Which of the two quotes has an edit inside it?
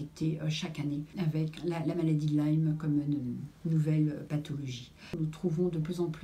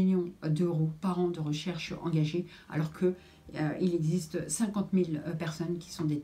first; 2 cuts; at 1.5 s, 5.1 s

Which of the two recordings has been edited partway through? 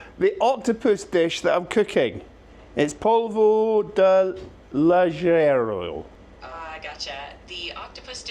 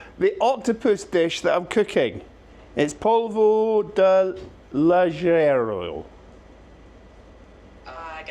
first; 1 cut; at 6.2 s

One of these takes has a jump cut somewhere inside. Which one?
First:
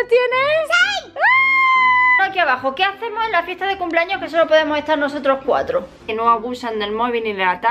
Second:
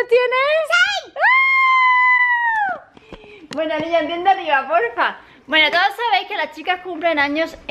first; 2 cuts; at 2.2 s, 6.0 s

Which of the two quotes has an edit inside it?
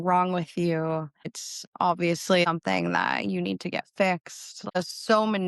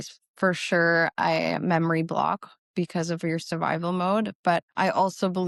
first; 2 cuts; at 2.5 s, 4.8 s

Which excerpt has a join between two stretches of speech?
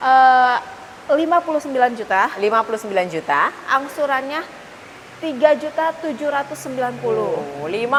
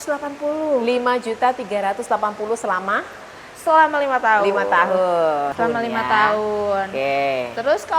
second; 1 cut; at 5.5 s

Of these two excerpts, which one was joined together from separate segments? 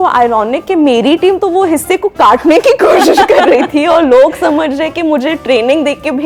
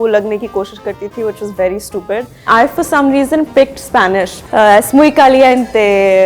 second; 2 cuts; at 2.5 s, 4.4 s

